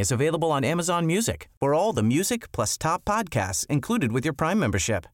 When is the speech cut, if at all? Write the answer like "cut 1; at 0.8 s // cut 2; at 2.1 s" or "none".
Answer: none

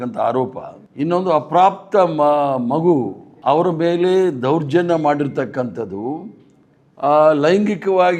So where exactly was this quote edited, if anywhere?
none

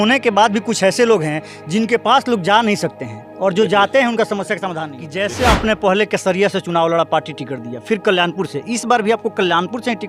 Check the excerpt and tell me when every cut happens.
cut 1; at 5.4 s

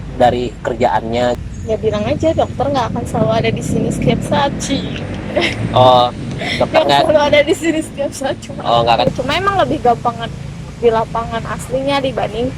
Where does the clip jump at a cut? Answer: cut 1; at 1.4 s // cut 2; at 9.1 s

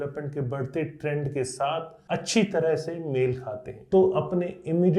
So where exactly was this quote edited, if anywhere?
cut 1; at 3.7 s

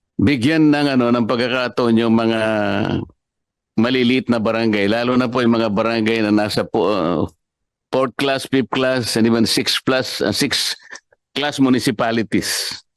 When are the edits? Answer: none

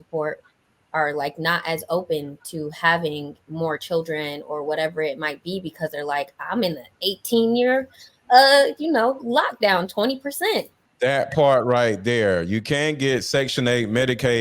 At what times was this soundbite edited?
cut 1; at 10.8 s

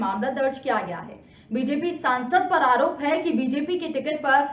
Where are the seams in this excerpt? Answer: none

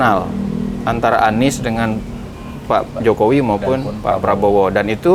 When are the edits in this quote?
none

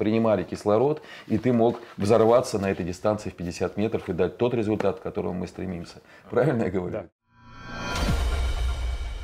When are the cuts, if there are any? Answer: cut 1; at 7.0 s

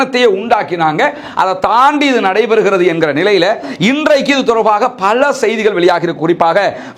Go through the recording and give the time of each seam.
none

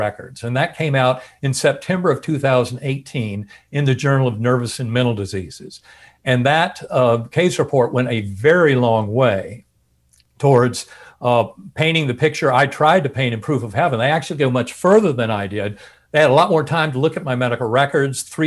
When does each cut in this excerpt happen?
none

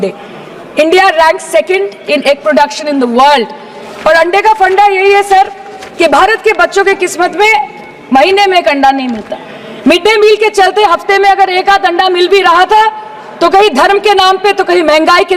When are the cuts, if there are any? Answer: none

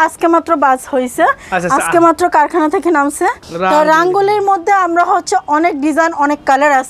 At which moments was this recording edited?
cut 1; at 3.5 s

